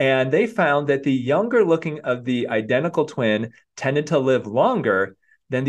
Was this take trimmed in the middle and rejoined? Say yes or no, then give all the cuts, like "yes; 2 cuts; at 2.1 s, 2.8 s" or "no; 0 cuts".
no; 0 cuts